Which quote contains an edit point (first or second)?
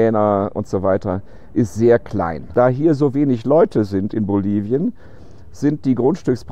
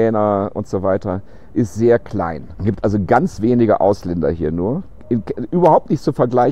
first